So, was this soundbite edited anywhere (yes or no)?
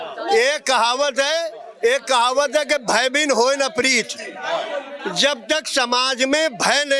no